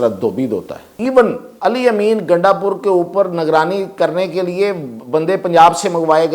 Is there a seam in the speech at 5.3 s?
no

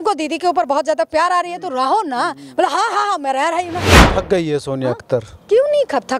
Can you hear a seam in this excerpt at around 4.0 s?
yes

